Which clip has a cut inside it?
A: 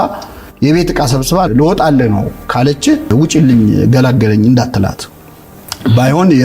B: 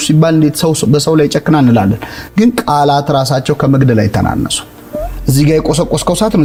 A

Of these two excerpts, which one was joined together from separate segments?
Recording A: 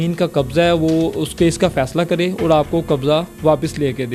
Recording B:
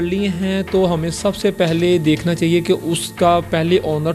B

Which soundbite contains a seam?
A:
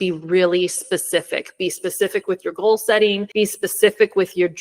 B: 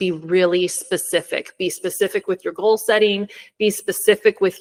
A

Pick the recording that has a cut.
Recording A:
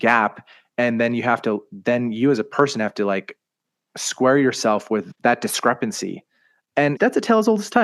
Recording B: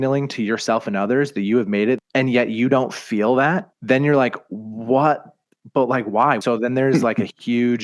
B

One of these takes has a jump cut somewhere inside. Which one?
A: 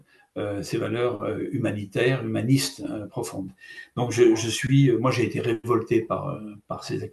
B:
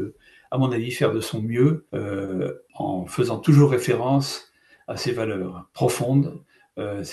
B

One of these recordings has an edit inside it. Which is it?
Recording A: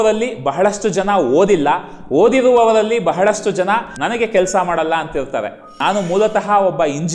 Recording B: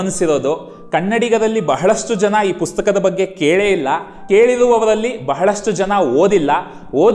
A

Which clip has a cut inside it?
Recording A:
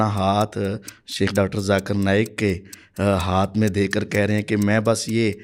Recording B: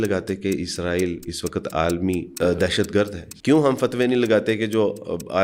B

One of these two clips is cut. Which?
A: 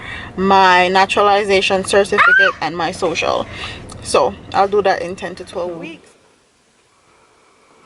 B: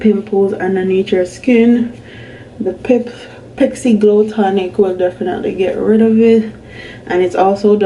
A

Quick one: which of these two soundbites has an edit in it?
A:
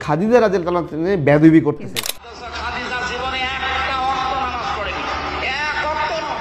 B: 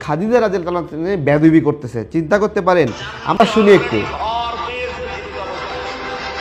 A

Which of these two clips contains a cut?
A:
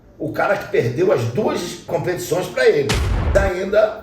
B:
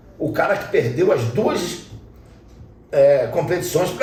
A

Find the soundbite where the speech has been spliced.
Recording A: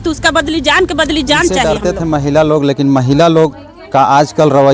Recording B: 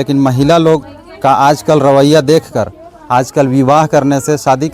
A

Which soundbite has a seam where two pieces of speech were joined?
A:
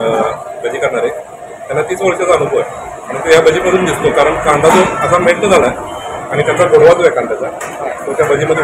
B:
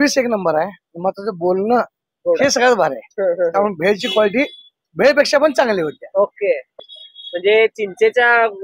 B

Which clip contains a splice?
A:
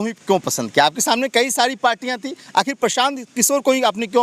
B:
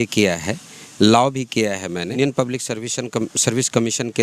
B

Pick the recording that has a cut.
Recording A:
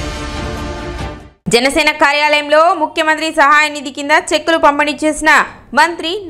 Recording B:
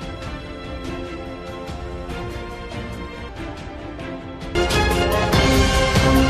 A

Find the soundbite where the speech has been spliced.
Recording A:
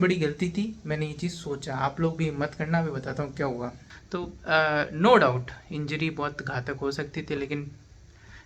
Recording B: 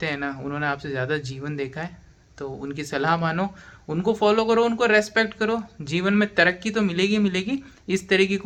A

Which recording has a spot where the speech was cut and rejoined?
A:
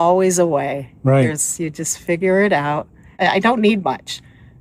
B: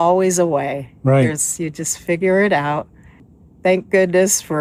A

